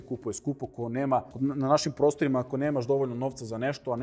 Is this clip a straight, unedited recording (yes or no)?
no